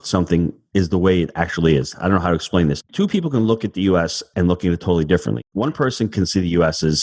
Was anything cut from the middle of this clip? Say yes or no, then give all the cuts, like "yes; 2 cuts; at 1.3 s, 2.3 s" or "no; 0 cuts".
yes; 2 cuts; at 2.9 s, 5.4 s